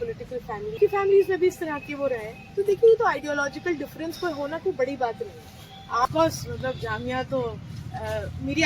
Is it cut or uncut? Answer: cut